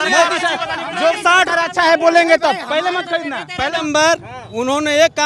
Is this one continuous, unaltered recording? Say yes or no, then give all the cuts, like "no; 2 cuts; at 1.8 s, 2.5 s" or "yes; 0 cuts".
no; 1 cut; at 3.7 s